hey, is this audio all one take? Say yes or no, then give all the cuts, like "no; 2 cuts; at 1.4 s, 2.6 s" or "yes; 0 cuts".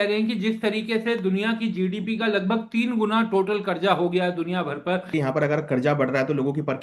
no; 1 cut; at 5.1 s